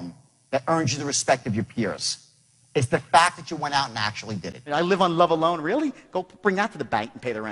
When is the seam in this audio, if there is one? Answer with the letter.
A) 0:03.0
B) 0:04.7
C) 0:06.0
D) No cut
B